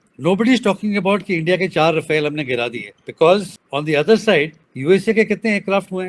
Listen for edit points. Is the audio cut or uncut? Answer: uncut